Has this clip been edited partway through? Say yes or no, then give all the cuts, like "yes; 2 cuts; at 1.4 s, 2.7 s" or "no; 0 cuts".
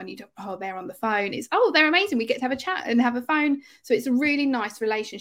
no; 0 cuts